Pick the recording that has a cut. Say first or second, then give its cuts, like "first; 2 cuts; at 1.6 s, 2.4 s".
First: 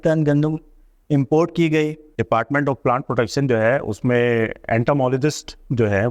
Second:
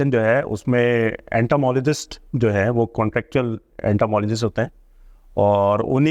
first; 1 cut; at 2.1 s